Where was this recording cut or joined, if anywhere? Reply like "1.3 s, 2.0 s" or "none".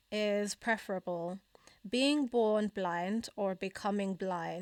none

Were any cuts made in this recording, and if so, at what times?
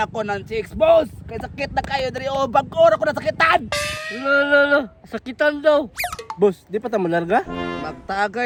none

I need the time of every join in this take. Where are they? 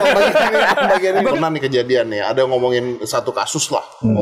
1.3 s

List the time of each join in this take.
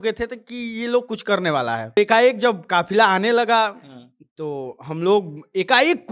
2.0 s

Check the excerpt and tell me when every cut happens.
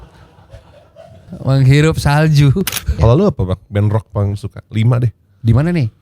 3.0 s

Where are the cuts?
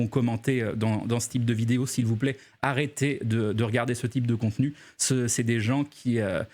1.7 s

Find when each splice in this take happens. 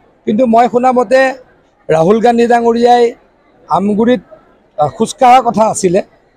none

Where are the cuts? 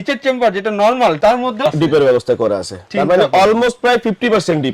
none

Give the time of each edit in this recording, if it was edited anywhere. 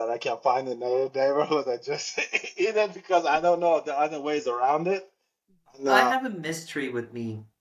6.1 s

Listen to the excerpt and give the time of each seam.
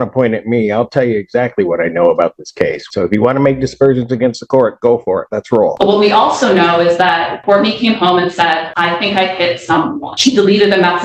2.8 s, 5.7 s, 7.3 s, 8.7 s, 10.1 s

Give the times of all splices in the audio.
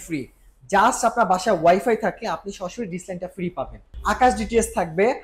3.9 s

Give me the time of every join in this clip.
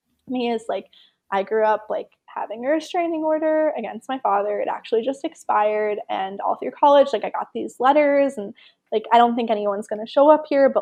none

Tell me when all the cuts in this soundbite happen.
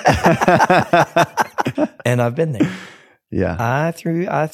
1.7 s

